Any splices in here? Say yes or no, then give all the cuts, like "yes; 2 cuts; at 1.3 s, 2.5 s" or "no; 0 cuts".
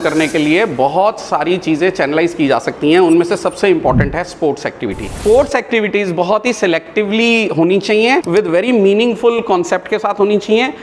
yes; 2 cuts; at 5.2 s, 8.3 s